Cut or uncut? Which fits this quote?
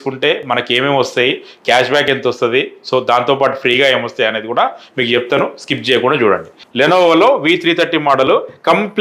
cut